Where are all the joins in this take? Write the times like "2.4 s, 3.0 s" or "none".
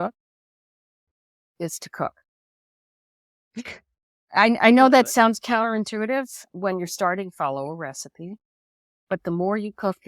6.5 s